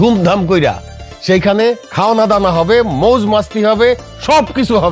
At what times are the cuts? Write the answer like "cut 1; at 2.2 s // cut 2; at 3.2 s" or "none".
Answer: cut 1; at 1.9 s